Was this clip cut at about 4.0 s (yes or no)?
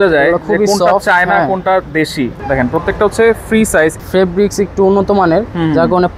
yes